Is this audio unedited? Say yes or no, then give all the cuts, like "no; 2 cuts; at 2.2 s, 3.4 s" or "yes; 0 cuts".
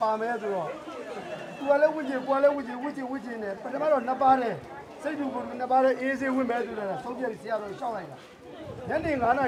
yes; 0 cuts